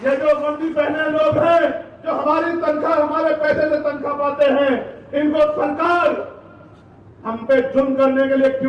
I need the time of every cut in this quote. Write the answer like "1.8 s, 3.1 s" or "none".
none